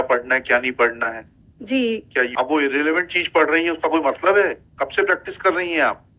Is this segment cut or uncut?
cut